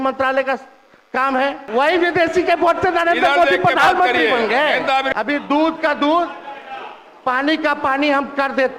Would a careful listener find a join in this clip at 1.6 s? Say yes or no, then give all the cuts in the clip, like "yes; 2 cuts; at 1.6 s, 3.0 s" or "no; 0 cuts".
yes; 2 cuts; at 1.6 s, 5.1 s